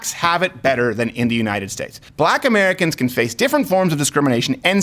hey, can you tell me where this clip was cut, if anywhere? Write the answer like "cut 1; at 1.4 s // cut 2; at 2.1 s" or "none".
cut 1; at 2.0 s